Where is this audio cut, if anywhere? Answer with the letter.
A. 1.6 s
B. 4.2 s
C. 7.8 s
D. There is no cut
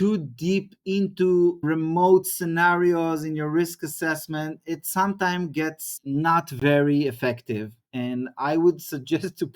A